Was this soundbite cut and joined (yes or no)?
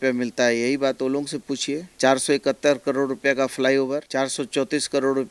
yes